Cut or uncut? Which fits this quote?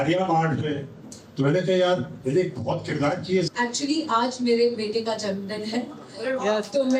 cut